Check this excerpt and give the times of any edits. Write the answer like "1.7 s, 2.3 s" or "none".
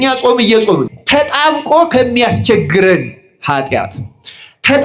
1.0 s